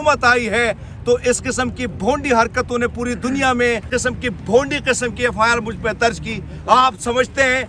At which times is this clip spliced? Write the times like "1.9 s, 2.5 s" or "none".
3.9 s

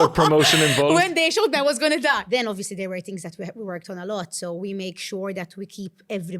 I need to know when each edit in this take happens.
2.2 s

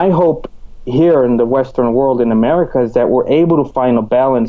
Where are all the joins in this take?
none

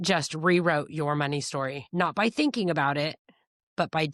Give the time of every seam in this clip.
1.8 s

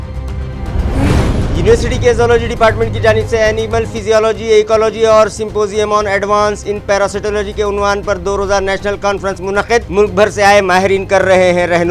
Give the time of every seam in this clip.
1.2 s

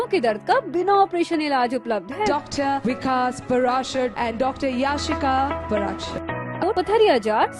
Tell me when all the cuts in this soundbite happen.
6.6 s

